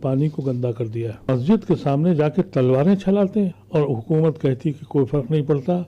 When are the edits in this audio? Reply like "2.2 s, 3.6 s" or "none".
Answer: 1.3 s, 3.6 s